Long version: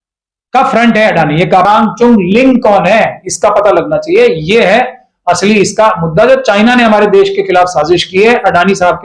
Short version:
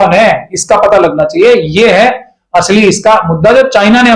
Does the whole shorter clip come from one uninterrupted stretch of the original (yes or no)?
yes